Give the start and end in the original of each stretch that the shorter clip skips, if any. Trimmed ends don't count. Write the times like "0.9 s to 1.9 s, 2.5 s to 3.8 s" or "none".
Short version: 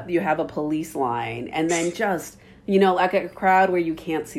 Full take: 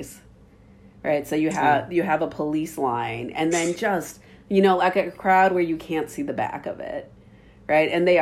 none